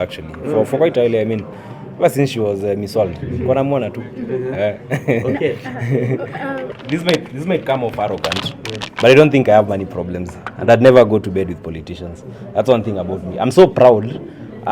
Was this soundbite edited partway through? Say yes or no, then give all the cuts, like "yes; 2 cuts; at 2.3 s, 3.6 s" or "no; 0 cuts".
yes; 1 cut; at 6.7 s